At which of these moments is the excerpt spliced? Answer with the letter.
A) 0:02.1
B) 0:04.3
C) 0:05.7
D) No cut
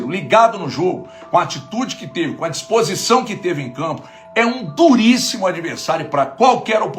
D